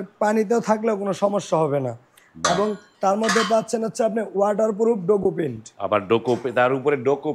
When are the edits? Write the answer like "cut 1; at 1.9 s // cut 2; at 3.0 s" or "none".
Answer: none

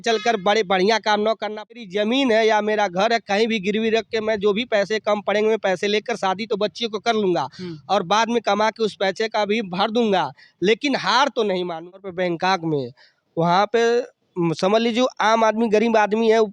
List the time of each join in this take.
cut 1; at 1.8 s // cut 2; at 11.9 s

